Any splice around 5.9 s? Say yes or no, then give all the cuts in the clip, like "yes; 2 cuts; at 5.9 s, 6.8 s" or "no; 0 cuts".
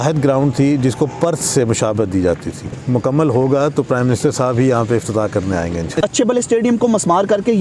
yes; 2 cuts; at 2.8 s, 5.9 s